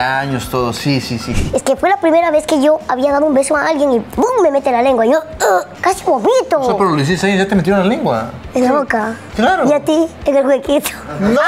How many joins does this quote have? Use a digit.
5